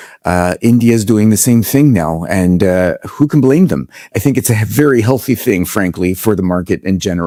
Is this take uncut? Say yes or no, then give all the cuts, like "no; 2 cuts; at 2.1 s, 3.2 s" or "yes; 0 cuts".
yes; 0 cuts